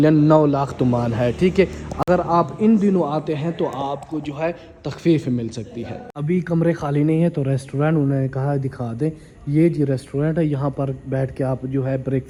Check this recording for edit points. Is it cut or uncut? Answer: uncut